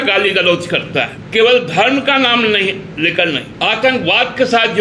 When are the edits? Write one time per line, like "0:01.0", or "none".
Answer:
0:01.2
0:03.5